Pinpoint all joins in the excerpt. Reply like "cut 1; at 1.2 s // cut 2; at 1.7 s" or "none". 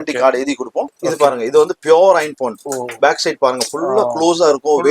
cut 1; at 0.9 s